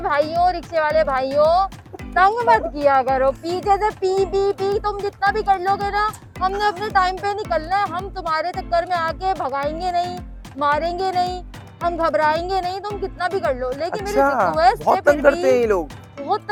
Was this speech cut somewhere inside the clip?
no; 0 cuts

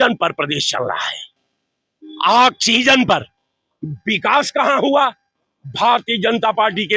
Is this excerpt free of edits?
yes; 0 cuts

